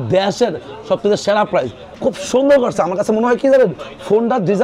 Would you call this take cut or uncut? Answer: cut